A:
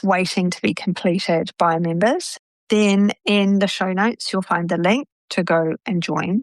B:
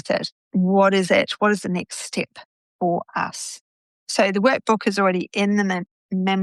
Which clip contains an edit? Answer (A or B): A